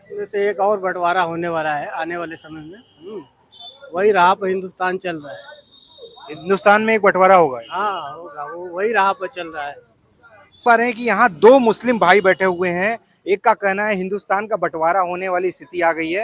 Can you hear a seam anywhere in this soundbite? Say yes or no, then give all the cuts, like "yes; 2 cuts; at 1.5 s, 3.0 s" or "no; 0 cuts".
yes; 1 cut; at 10.6 s